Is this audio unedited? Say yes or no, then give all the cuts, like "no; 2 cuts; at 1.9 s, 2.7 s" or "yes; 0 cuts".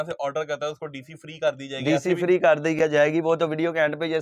yes; 0 cuts